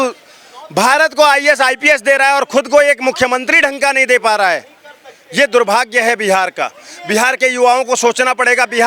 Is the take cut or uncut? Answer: uncut